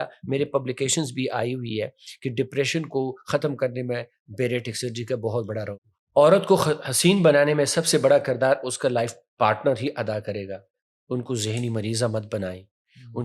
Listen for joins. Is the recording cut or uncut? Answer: cut